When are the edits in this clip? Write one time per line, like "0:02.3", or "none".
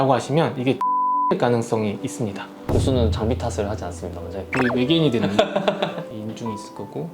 0:02.5
0:04.5
0:06.0